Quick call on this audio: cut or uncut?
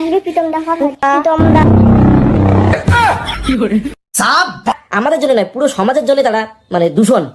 cut